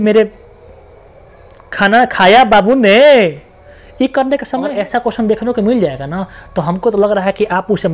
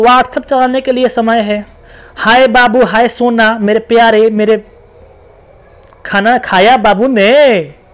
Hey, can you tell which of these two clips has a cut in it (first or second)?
first